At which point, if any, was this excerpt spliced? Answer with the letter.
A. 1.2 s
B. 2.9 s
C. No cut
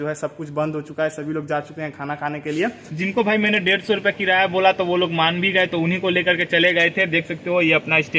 B